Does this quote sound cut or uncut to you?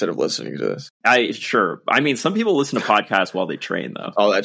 uncut